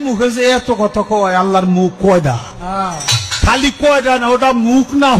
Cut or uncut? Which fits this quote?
uncut